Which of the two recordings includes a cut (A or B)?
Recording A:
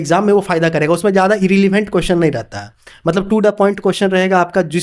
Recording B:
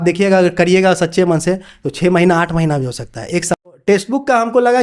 B